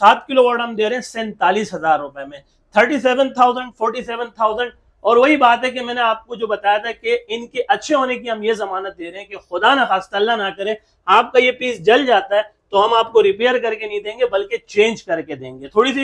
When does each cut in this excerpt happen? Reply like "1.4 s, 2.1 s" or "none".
none